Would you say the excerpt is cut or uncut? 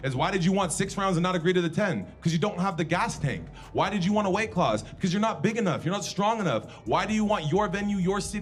uncut